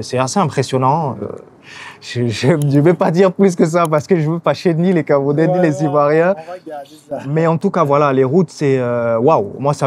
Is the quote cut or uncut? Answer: uncut